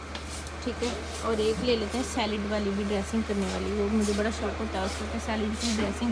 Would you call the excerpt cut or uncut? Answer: uncut